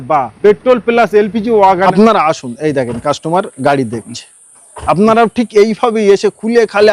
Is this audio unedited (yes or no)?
no